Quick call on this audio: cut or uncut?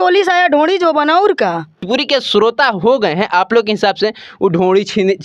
cut